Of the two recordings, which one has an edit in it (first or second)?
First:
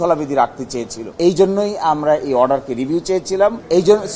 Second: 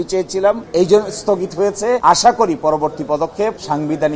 first